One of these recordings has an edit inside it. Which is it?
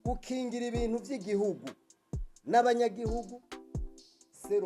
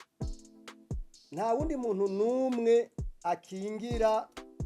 second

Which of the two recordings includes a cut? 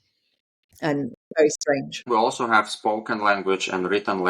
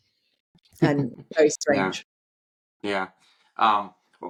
first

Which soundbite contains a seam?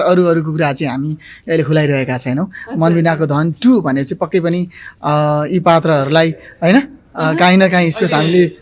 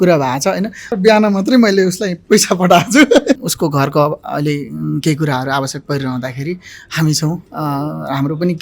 second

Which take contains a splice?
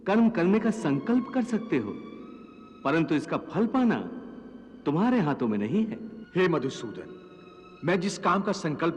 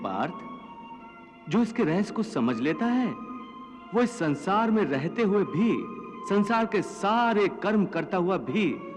first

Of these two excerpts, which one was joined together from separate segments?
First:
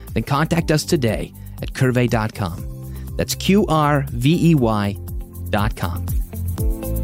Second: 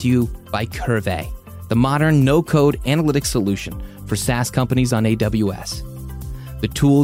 first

